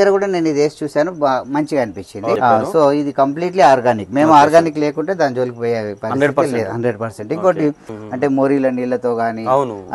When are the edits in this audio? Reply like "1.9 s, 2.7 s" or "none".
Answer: 2.4 s, 7.9 s